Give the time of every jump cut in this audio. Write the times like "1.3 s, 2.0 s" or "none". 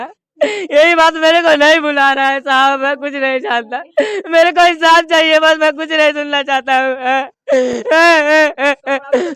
none